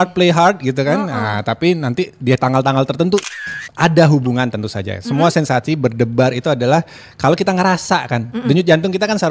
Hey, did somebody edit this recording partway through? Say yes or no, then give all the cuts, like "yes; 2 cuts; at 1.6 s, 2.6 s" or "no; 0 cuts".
yes; 1 cut; at 3.3 s